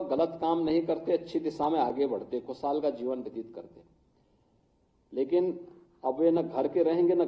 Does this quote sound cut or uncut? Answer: uncut